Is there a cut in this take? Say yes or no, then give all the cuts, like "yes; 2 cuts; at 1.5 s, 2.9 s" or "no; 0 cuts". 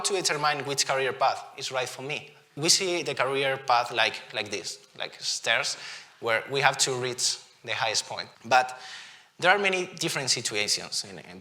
yes; 2 cuts; at 2.5 s, 8.3 s